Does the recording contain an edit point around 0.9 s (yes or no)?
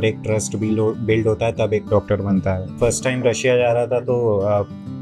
no